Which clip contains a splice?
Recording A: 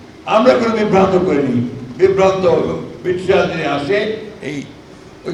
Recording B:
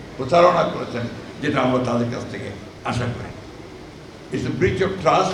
B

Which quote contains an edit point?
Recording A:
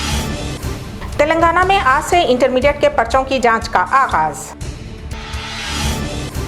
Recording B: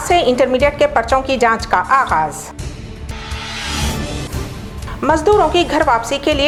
A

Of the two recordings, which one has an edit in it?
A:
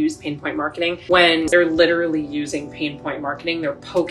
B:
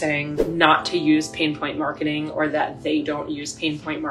A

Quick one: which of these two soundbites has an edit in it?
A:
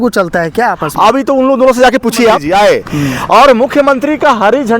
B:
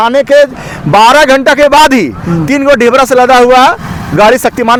A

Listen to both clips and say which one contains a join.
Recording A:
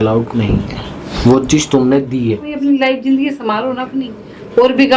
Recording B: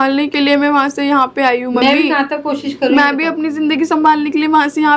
A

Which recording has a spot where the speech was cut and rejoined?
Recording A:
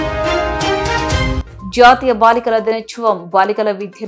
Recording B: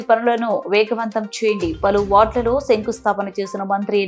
A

